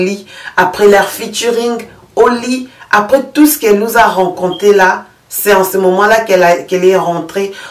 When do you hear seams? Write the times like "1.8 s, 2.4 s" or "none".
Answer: none